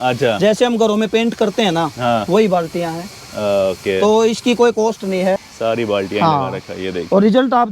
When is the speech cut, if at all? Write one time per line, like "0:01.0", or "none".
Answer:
0:05.4